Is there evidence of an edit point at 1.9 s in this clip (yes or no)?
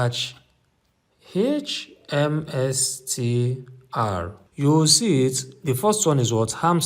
no